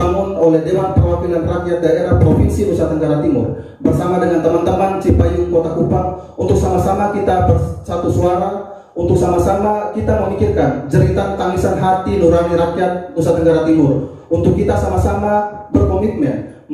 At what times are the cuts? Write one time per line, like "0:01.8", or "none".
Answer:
none